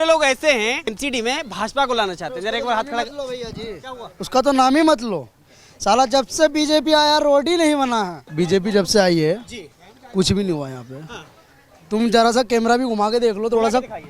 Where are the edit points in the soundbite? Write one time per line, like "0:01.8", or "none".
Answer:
0:01.0
0:08.2